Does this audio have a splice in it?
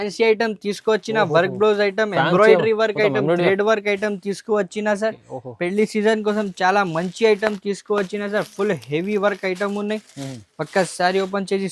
no; 0 cuts

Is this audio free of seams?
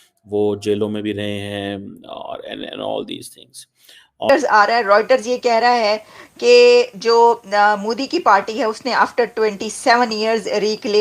no; 1 cut; at 4.3 s

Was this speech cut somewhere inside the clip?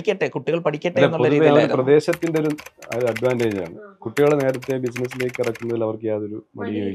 no; 0 cuts

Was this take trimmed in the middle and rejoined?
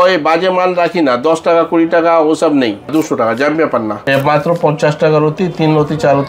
yes; 2 cuts; at 2.9 s, 4.0 s

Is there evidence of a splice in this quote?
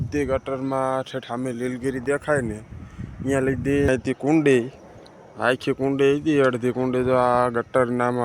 yes; 1 cut; at 3.9 s

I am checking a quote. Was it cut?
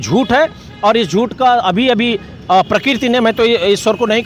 no; 0 cuts

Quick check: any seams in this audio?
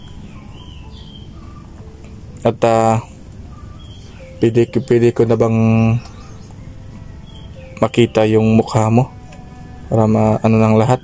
no; 0 cuts

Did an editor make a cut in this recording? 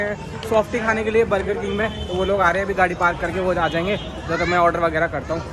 no; 0 cuts

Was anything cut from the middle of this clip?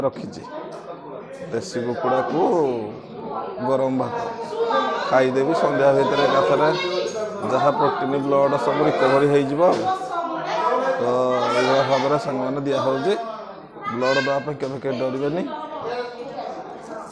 no; 0 cuts

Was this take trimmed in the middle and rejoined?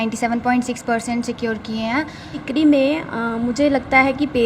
yes; 1 cut; at 2.3 s

